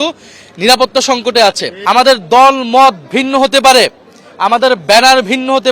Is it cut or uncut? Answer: cut